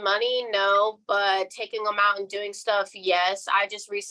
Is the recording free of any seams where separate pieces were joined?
yes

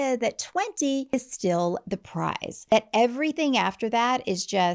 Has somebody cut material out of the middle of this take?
yes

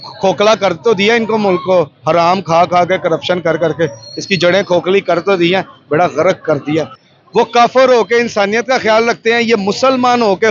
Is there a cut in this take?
yes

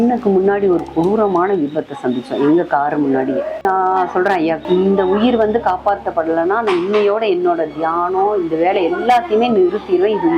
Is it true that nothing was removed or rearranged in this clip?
no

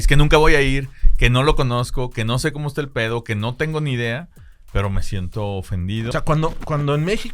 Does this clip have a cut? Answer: yes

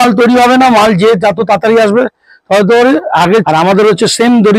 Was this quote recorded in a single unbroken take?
no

